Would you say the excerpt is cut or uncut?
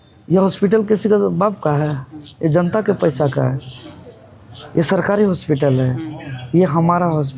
uncut